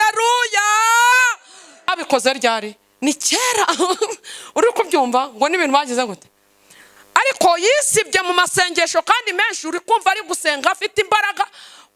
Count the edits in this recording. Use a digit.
1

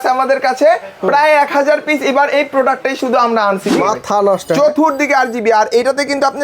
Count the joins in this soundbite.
1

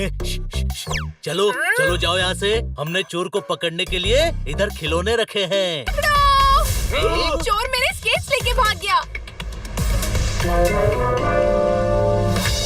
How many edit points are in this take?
1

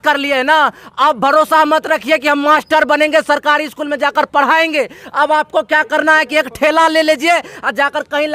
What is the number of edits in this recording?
0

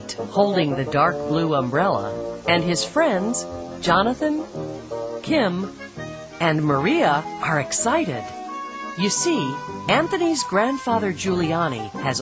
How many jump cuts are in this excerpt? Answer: 1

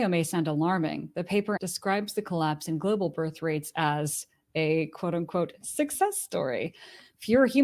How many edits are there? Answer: 1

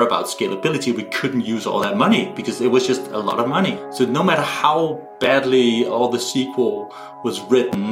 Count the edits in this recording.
1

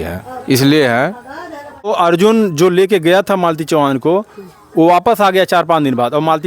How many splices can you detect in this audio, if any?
1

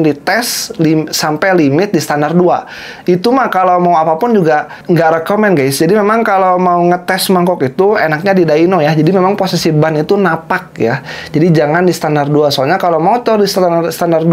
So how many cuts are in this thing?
1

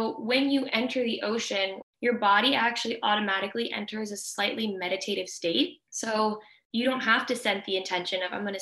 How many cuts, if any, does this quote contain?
3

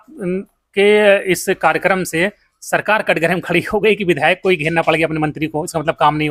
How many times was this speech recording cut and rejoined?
0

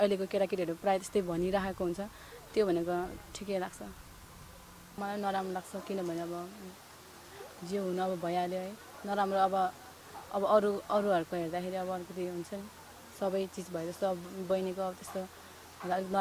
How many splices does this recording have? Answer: 1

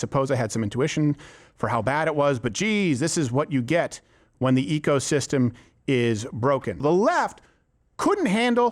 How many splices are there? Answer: 1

